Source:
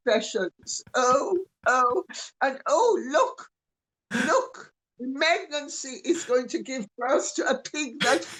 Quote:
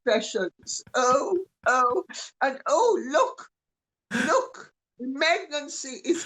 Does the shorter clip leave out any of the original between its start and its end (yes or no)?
no